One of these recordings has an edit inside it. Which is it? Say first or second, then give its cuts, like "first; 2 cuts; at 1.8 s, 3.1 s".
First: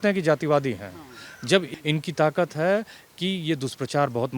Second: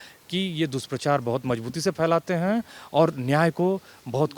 first; 1 cut; at 1.7 s